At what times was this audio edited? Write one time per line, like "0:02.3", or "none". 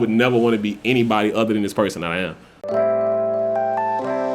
0:02.7